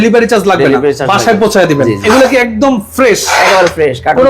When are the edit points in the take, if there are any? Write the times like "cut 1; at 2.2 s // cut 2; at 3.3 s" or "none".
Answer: cut 1; at 2.0 s